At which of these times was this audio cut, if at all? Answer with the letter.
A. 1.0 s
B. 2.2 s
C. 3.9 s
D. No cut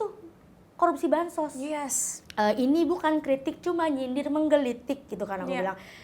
D